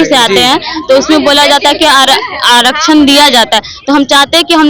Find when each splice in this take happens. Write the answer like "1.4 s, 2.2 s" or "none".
none